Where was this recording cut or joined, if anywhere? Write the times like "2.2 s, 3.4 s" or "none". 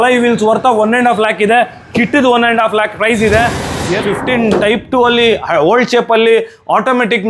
4.0 s

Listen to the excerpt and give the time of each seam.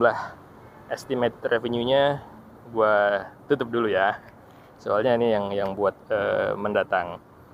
none

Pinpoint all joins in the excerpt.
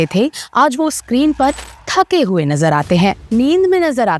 3.2 s

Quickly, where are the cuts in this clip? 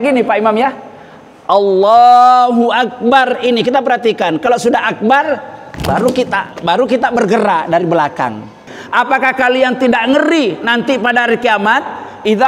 8.7 s

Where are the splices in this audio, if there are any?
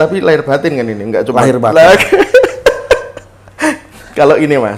none

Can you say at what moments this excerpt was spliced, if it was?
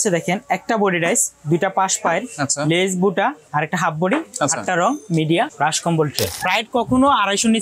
6.3 s

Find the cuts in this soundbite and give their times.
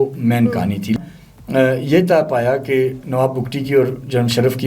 1.0 s

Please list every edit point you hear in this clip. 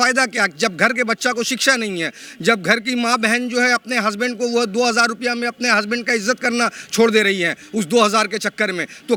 none

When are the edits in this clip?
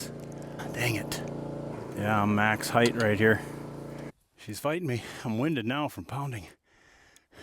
4.0 s

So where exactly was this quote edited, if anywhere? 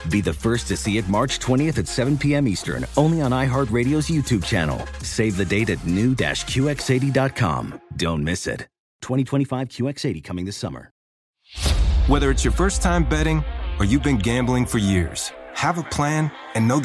11.1 s

